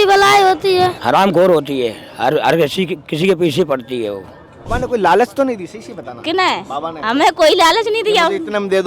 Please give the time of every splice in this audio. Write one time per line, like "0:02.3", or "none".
0:01.0
0:04.7